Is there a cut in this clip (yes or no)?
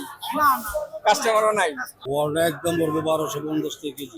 yes